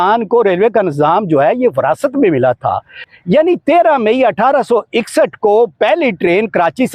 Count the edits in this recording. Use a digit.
1